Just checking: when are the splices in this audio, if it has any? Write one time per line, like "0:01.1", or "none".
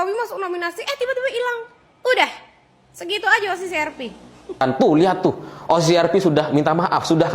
0:04.6